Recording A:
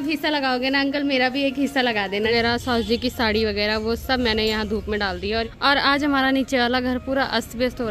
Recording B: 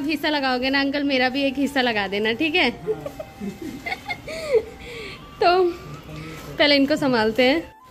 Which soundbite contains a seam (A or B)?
A